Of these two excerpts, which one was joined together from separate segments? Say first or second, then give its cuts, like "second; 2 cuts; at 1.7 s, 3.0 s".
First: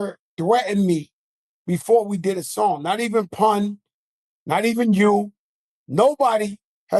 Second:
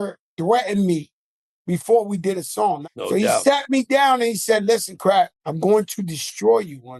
second; 2 cuts; at 2.8 s, 5.4 s